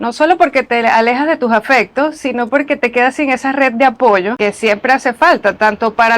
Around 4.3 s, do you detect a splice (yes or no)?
yes